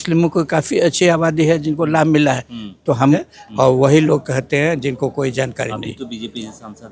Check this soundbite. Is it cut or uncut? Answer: cut